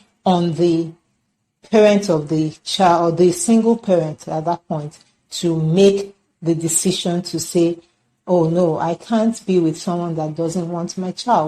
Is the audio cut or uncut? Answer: uncut